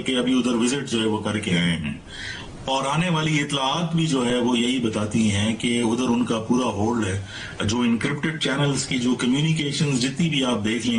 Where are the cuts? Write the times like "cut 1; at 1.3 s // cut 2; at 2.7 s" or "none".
none

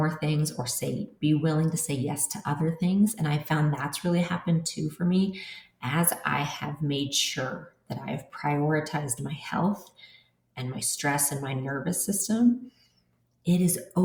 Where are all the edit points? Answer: none

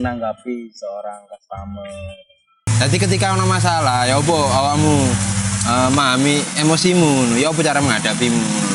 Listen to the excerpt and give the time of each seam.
cut 1; at 2.7 s

